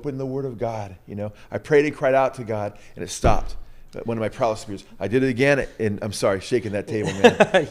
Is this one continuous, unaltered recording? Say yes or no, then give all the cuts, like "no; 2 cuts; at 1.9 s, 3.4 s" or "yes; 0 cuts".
yes; 0 cuts